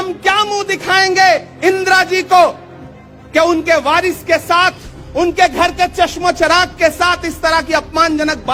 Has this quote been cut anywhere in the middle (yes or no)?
no